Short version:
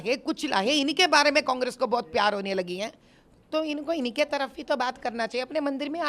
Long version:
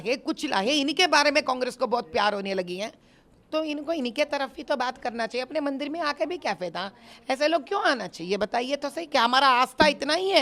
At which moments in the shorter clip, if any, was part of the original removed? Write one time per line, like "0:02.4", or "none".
none